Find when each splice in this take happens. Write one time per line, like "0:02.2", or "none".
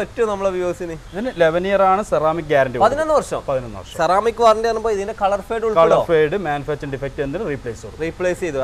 none